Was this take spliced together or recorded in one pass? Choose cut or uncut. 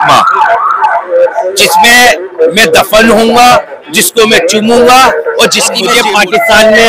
cut